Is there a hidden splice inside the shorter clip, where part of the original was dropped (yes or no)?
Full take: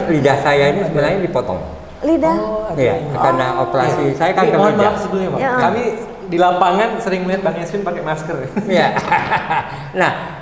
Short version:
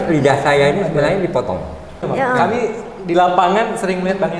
yes